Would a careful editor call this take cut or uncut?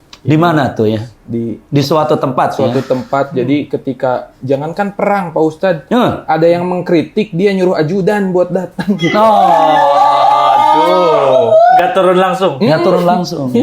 uncut